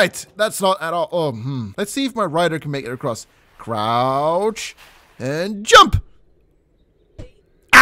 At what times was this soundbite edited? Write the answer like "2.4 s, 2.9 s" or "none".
1.7 s